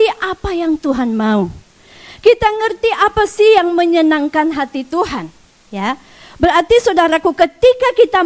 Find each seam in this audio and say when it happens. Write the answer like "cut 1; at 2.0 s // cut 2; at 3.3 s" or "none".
none